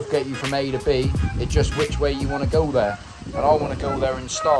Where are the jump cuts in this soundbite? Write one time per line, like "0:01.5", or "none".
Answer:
none